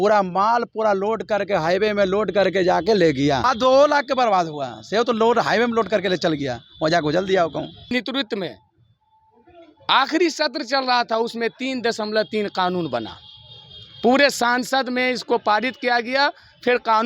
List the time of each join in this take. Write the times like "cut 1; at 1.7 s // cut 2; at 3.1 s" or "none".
cut 1; at 3.4 s // cut 2; at 7.9 s